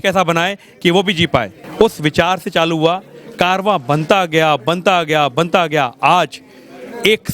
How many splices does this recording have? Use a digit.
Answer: 1